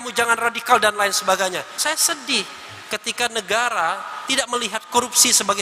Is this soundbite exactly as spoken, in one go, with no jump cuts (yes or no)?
no